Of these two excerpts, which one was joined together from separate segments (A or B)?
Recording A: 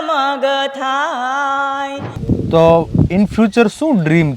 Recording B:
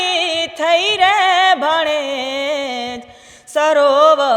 A